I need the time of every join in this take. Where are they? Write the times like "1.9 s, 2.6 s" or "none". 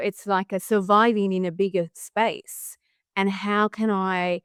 none